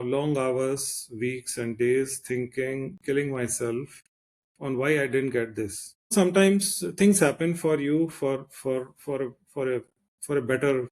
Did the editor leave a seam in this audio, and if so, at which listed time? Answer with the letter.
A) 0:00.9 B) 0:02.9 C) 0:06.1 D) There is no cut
C